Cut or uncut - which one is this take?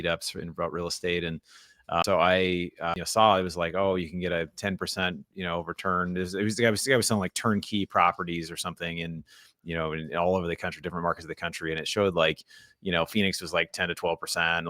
cut